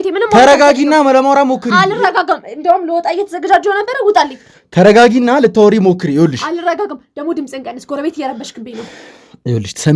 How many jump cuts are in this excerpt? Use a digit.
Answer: 0